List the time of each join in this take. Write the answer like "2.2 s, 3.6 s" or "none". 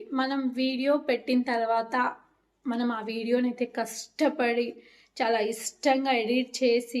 none